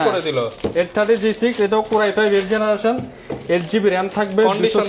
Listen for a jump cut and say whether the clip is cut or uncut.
uncut